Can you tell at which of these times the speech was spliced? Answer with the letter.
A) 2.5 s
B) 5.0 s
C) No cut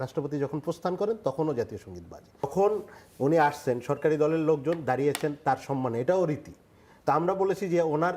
A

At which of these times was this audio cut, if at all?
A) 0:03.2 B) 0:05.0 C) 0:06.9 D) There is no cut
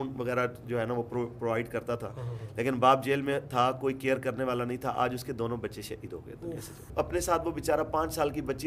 C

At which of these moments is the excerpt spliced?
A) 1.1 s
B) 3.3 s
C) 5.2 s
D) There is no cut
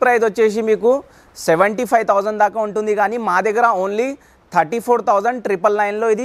D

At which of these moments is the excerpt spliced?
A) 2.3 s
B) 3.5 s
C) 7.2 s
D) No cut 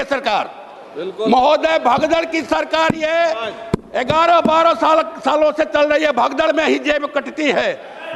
D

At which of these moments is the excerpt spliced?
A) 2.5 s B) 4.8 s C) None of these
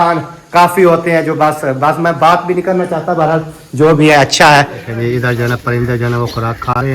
B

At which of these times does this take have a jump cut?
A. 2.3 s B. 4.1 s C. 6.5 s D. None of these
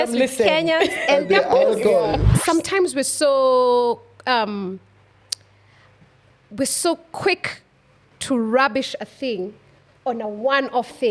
A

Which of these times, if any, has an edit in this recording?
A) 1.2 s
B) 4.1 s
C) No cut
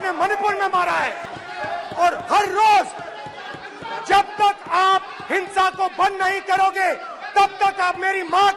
A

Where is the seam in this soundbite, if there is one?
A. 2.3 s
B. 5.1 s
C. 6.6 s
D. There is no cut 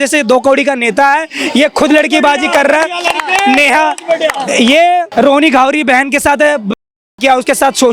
B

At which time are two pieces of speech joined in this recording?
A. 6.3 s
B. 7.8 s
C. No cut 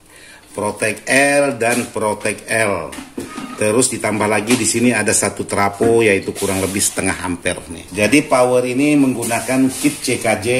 B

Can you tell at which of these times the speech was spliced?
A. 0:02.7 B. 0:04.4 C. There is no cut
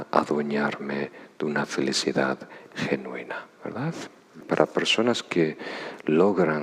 B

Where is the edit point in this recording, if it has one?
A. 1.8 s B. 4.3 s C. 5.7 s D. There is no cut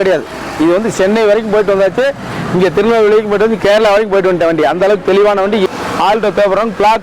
C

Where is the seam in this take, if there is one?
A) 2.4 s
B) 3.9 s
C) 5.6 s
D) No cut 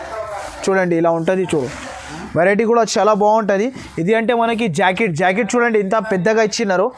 D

